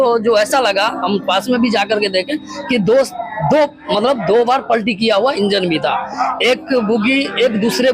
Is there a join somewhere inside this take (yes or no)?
no